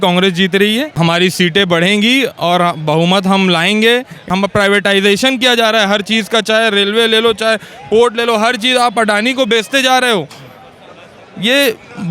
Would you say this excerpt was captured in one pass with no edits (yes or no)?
no